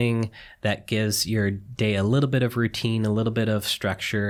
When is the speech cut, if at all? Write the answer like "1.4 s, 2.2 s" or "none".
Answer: none